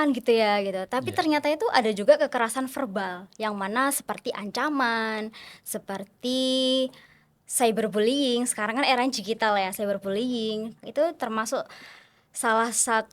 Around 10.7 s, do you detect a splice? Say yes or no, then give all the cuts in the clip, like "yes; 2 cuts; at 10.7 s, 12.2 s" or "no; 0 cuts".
yes; 1 cut; at 10.7 s